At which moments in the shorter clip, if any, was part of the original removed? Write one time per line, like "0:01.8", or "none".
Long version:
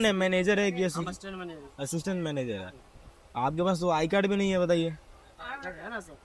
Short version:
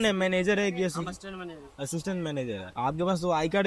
0:02.7